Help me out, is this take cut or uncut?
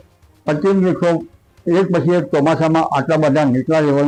uncut